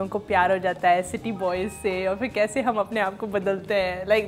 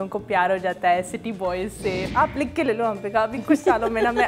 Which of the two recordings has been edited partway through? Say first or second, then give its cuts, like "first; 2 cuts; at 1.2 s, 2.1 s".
second; 1 cut; at 2.0 s